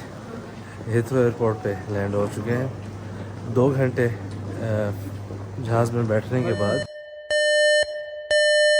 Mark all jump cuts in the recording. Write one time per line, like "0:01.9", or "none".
none